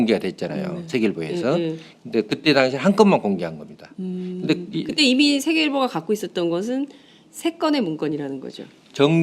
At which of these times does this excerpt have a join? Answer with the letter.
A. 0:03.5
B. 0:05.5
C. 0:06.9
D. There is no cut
A